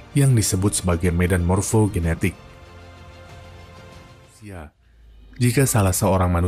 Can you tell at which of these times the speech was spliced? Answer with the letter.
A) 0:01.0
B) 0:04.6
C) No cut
B